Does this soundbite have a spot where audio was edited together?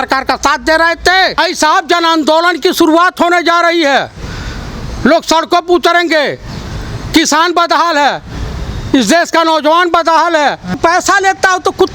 yes; 2 cuts; at 1.4 s, 10.8 s

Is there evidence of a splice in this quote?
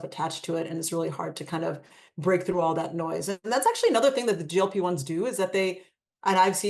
no; 0 cuts

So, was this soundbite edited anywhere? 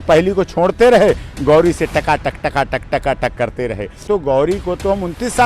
yes; 1 cut; at 4.0 s

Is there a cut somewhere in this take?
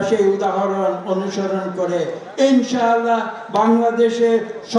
no; 0 cuts

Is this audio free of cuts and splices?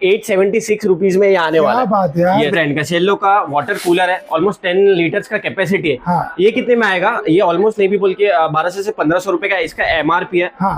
yes; 0 cuts

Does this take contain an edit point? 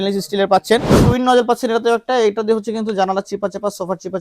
yes; 1 cut; at 0.9 s

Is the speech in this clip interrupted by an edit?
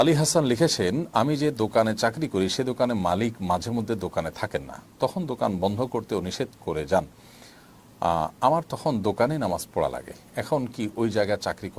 no; 0 cuts

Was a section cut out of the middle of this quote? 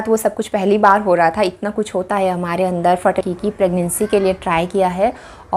yes; 1 cut; at 3.2 s

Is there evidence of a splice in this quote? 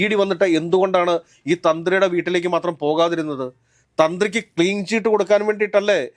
no; 0 cuts

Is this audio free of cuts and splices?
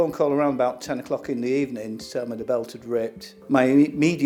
yes; 0 cuts

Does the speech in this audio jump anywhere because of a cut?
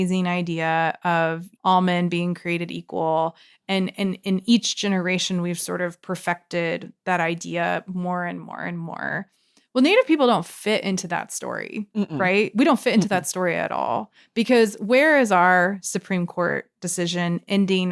yes; 1 cut; at 1.5 s

